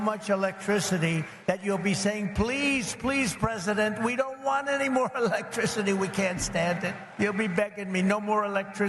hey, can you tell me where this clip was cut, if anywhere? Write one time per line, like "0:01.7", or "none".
0:01.3
0:07.0